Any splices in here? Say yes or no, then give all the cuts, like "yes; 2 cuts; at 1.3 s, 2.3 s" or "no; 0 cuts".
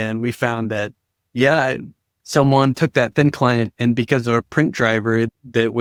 no; 0 cuts